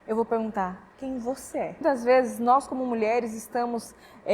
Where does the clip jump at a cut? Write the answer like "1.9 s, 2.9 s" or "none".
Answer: 1.8 s